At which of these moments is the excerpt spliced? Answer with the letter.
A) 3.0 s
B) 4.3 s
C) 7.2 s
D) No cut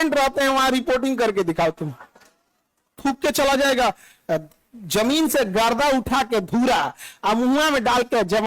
A